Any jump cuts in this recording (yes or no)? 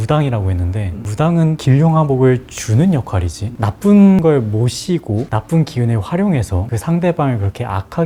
no